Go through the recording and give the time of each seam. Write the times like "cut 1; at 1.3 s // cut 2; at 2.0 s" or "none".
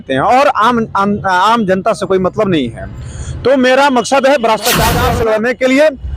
cut 1; at 5.0 s